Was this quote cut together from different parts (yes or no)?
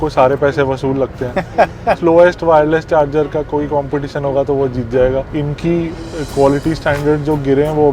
yes